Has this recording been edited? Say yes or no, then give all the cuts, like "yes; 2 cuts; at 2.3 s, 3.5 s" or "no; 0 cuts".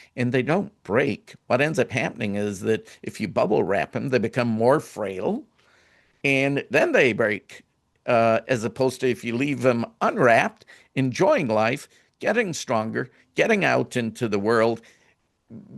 no; 0 cuts